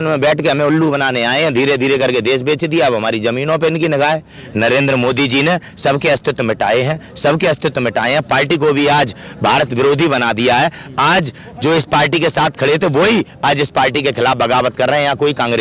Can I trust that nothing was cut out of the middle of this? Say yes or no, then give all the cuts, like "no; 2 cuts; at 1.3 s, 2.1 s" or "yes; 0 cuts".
no; 1 cut; at 4.4 s